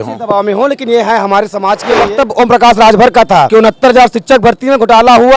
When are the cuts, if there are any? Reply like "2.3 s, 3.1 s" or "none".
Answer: 1.9 s, 3.5 s